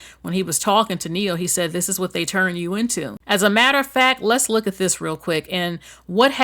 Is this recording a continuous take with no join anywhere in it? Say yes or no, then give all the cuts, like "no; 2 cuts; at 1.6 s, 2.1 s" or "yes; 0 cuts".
no; 1 cut; at 3.1 s